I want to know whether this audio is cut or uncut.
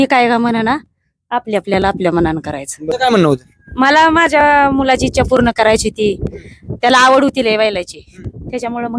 cut